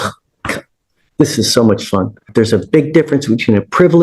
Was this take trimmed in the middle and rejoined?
yes; 1 cut; at 2.3 s

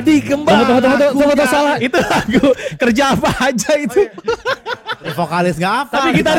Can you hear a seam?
yes; 2 cuts; at 1.8 s, 4.9 s

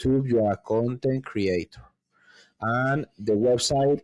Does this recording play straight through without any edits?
yes; 0 cuts

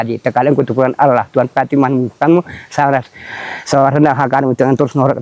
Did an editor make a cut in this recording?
no; 0 cuts

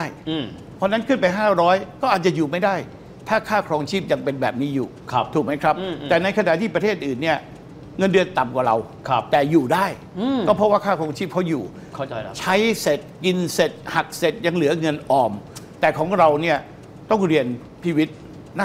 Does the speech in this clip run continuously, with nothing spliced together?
yes; 0 cuts

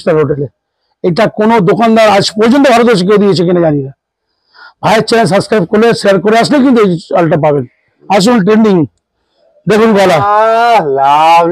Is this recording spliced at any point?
yes; 1 cut; at 8.0 s

